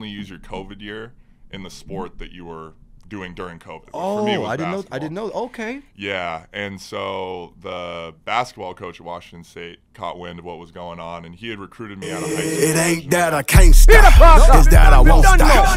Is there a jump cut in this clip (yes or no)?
yes